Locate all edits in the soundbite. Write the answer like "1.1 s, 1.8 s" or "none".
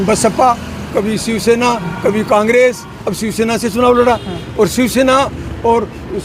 3.0 s